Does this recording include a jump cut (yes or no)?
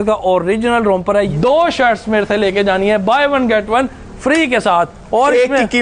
yes